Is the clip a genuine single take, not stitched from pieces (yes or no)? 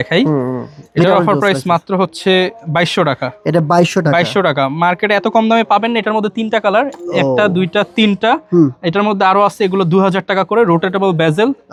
yes